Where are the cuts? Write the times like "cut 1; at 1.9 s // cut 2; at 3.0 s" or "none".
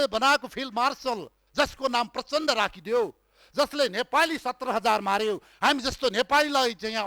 cut 1; at 1.4 s